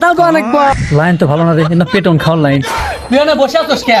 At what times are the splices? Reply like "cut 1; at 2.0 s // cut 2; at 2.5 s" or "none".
cut 1; at 0.8 s // cut 2; at 2.8 s